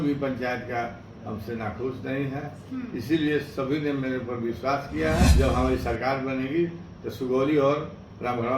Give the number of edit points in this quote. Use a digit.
1